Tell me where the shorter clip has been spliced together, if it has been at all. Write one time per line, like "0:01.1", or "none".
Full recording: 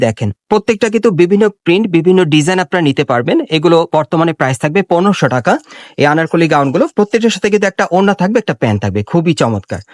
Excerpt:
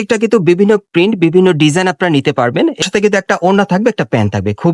0:02.9